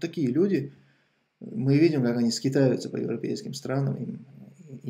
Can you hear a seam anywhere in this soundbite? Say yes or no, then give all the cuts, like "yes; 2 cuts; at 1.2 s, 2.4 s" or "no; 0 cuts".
no; 0 cuts